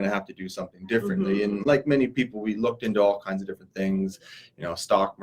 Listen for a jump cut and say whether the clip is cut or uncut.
uncut